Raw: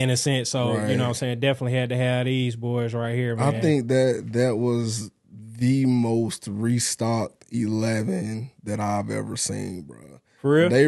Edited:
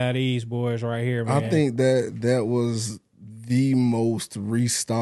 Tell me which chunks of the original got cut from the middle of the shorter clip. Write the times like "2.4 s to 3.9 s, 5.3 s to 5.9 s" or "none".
none